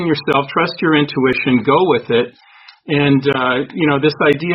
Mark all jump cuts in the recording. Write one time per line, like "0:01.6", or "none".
none